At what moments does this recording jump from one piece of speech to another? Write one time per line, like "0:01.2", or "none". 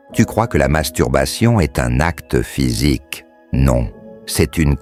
none